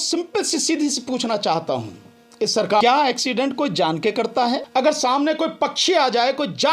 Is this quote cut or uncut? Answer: cut